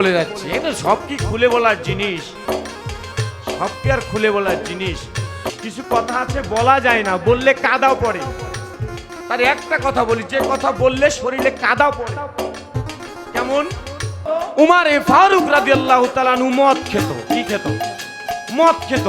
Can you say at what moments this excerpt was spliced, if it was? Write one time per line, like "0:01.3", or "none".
0:05.5
0:08.7
0:14.2